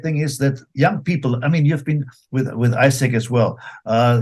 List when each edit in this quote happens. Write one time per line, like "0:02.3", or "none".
none